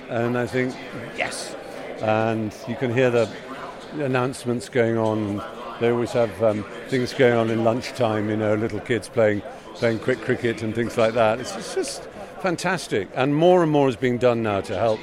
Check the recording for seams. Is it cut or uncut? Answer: uncut